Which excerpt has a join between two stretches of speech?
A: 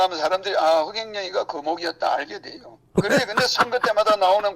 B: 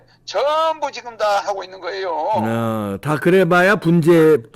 A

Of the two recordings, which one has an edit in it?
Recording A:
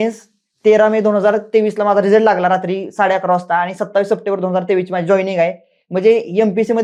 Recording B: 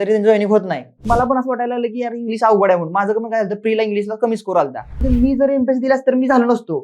B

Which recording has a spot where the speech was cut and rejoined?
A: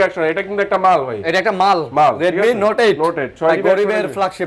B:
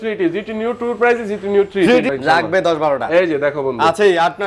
B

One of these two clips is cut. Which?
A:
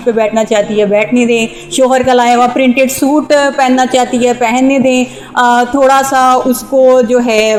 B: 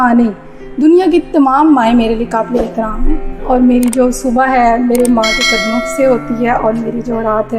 B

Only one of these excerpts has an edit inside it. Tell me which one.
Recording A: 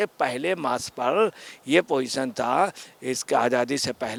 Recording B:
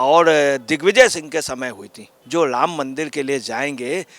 B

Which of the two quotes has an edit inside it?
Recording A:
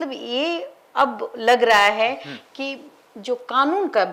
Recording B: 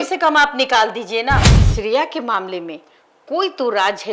B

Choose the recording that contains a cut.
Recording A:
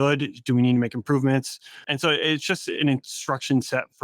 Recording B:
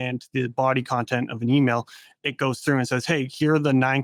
A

